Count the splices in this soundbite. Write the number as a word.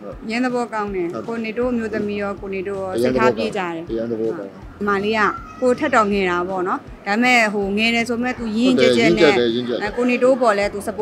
one